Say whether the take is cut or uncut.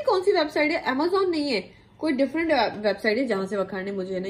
uncut